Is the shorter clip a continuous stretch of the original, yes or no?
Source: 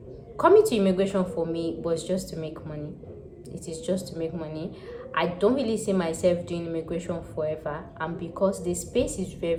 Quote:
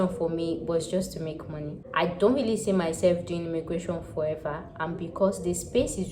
no